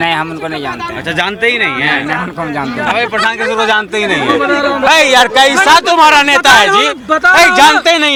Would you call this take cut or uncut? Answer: uncut